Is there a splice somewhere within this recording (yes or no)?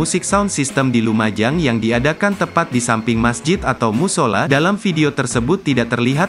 yes